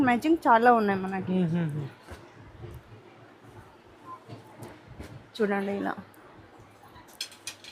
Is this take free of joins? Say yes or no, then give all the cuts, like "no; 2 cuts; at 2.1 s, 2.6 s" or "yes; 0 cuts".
yes; 0 cuts